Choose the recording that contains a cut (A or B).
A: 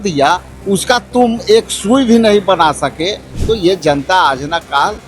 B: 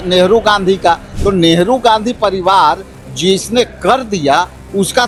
A